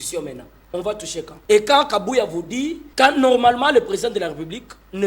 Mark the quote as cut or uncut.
cut